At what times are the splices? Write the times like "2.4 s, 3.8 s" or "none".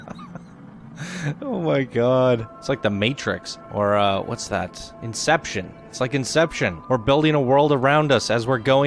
2.5 s